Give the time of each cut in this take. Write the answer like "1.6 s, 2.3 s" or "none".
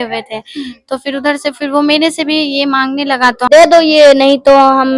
3.4 s